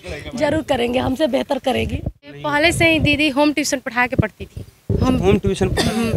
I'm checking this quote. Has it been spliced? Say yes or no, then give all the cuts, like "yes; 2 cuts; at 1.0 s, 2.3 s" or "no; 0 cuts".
yes; 1 cut; at 2.2 s